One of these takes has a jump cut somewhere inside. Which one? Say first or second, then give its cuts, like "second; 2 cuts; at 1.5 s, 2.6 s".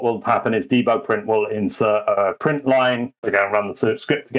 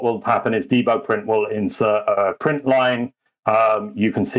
first; 1 cut; at 3.2 s